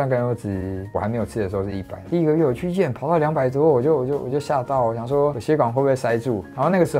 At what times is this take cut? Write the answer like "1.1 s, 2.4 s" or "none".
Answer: none